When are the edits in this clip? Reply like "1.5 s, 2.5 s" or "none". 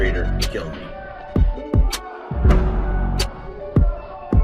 1.0 s